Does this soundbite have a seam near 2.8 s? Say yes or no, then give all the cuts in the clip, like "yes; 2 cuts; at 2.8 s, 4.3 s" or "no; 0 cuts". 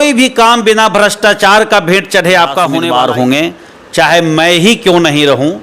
yes; 1 cut; at 2.8 s